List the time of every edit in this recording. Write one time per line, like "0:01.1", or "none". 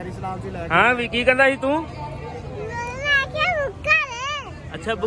none